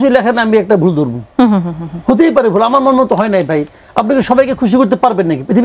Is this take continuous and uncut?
yes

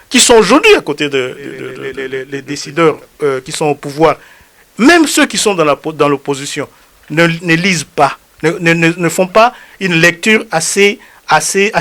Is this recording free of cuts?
no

